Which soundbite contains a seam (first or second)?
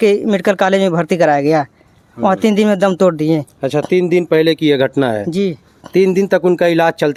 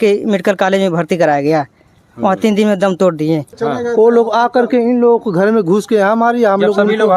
second